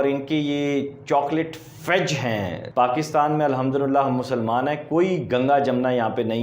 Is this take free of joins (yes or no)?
no